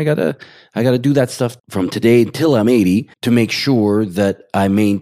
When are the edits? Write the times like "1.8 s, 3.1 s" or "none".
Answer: 3.1 s